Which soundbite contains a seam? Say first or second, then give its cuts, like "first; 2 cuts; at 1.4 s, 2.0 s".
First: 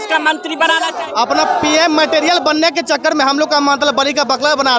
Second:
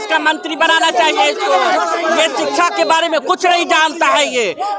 first; 1 cut; at 0.9 s